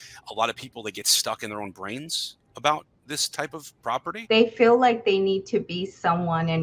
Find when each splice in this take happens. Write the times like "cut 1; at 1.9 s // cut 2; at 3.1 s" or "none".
cut 1; at 4.1 s